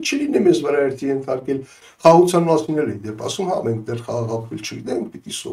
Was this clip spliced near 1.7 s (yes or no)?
yes